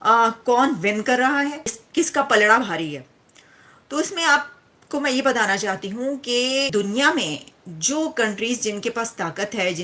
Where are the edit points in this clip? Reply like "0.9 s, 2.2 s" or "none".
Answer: 1.8 s, 6.7 s